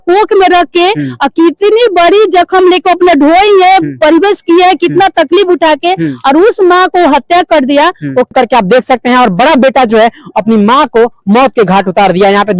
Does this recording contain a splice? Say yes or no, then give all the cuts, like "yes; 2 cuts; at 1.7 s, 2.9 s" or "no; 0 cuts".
yes; 1 cut; at 8.3 s